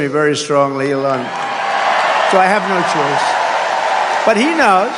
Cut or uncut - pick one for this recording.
uncut